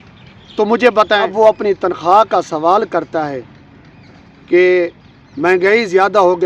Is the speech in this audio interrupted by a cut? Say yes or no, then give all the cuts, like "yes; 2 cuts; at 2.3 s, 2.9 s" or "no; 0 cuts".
yes; 1 cut; at 1.3 s